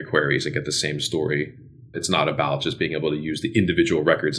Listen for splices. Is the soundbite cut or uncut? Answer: uncut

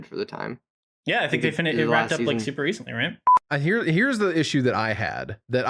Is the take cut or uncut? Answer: cut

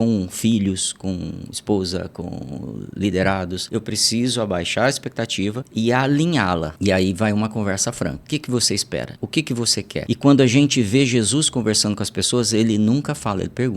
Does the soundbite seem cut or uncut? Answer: cut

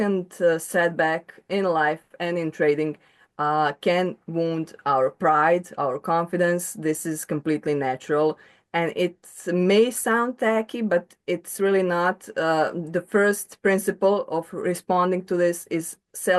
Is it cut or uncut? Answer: uncut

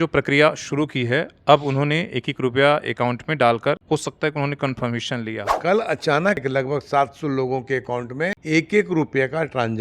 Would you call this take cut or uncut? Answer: cut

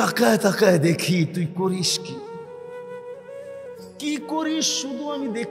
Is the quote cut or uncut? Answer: cut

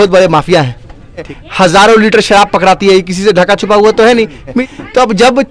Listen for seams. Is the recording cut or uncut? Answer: cut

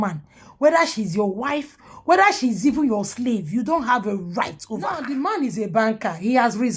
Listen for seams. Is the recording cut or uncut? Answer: cut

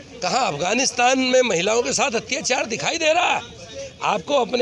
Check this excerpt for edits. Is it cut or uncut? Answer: uncut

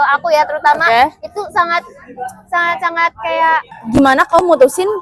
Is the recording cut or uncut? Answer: cut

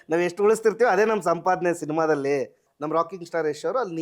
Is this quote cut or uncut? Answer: cut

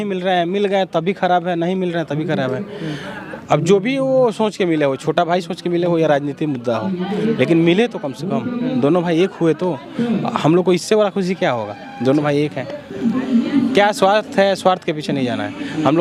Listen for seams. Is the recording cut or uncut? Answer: uncut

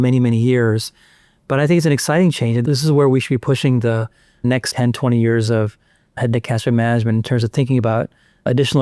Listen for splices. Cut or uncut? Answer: cut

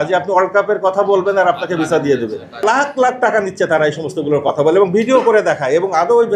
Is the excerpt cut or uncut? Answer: cut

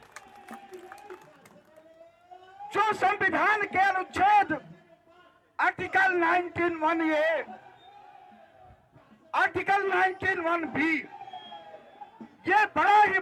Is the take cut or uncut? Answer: uncut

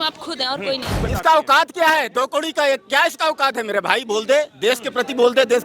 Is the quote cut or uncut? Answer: cut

